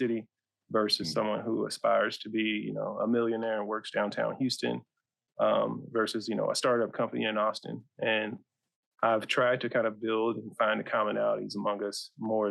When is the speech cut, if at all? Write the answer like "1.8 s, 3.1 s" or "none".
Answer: none